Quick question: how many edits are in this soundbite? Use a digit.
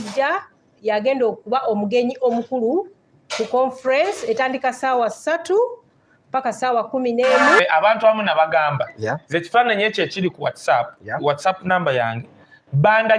1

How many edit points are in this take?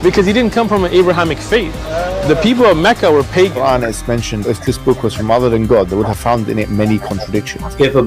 1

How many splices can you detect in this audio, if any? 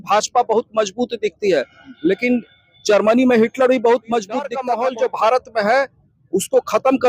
1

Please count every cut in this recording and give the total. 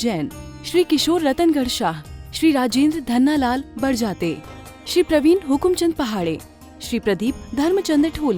0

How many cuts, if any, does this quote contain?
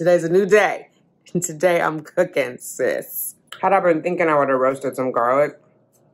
1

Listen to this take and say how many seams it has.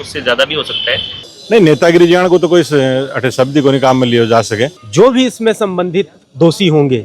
2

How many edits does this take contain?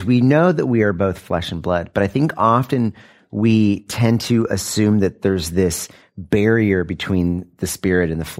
0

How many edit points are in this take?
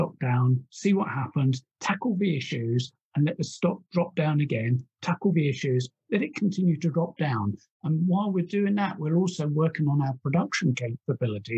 1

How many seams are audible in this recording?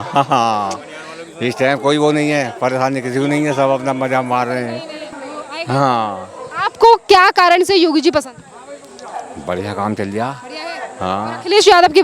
1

